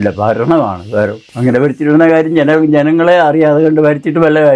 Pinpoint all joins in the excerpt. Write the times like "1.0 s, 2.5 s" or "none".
1.2 s